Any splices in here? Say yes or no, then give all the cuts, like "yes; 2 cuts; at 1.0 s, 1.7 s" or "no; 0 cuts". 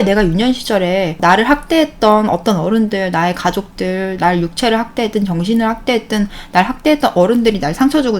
yes; 1 cut; at 1.2 s